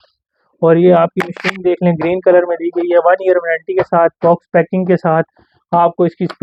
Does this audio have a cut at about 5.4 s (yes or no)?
no